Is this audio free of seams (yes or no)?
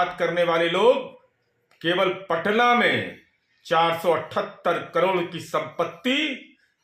yes